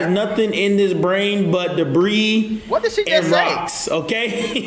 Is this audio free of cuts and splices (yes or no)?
yes